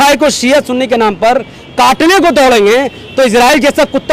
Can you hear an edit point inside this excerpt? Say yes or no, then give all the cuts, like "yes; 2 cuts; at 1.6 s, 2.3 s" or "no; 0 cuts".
no; 0 cuts